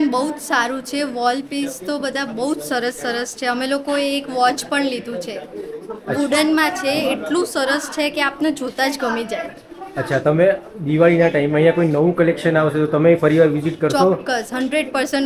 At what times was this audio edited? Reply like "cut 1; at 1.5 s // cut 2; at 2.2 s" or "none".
none